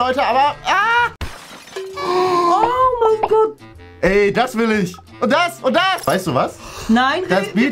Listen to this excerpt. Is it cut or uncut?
cut